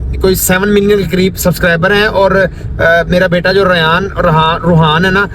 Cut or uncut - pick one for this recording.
uncut